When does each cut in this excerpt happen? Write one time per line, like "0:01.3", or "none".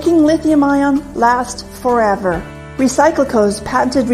0:01.5